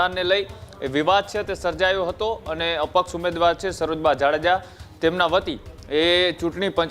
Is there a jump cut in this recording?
no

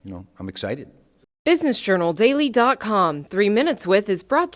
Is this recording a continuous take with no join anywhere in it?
no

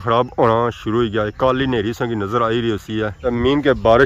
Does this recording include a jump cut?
no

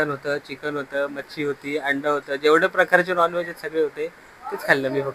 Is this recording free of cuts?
yes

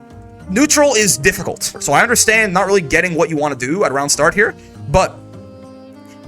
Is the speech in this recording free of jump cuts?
no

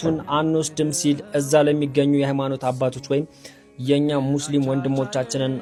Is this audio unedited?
yes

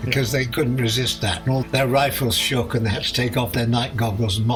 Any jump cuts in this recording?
no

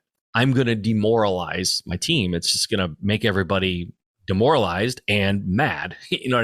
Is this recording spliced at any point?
no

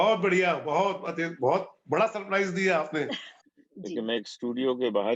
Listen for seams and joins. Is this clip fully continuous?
no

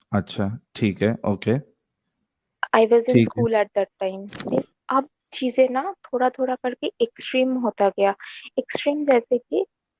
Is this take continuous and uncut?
no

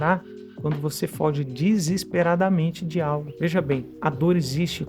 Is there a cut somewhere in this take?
yes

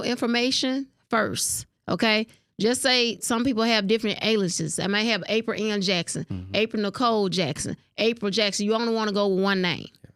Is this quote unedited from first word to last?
yes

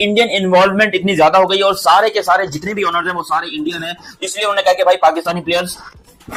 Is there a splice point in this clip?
no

